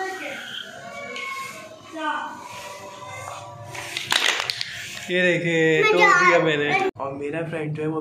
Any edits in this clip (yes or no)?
yes